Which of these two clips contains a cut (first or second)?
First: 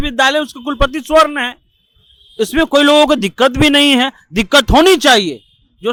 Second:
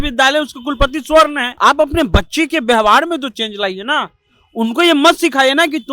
second